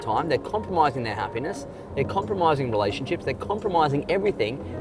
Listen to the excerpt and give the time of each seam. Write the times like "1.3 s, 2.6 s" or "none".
none

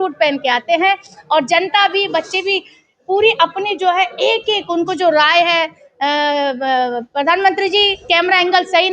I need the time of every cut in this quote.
none

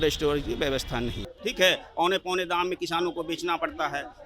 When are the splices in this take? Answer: 1.2 s

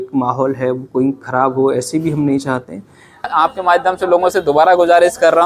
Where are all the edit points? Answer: 3.3 s

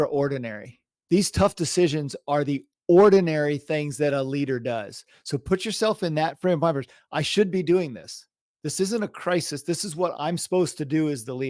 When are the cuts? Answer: 10.1 s

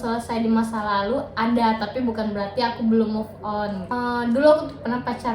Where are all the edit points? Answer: 3.9 s

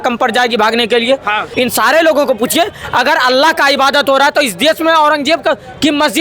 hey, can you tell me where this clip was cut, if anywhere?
1.4 s

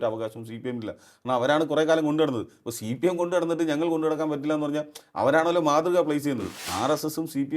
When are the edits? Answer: 6.6 s

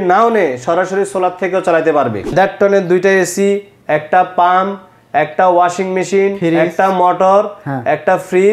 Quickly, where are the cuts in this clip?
2.3 s

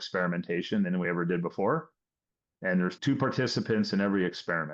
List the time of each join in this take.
3.0 s

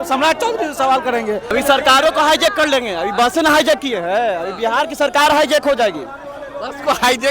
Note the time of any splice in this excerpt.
1.5 s

